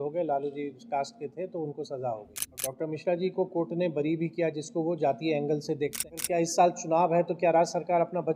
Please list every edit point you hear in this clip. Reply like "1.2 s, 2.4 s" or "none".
2.7 s, 6.1 s